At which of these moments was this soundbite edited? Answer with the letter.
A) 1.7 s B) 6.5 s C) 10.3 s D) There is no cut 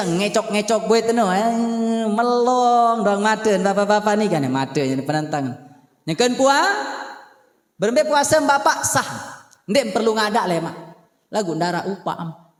D